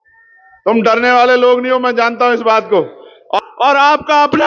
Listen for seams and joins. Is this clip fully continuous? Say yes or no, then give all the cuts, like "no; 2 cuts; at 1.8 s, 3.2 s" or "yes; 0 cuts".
no; 1 cut; at 3.4 s